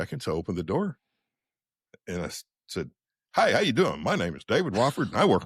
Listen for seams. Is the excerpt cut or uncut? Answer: uncut